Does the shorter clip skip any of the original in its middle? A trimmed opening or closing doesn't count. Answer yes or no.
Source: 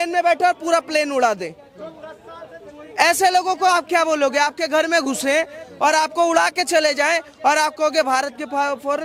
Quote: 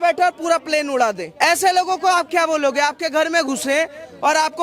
yes